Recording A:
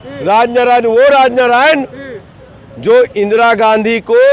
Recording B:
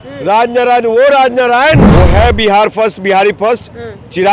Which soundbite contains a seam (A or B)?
B